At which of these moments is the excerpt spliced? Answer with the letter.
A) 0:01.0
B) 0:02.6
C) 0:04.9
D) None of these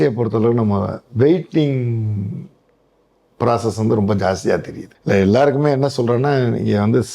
C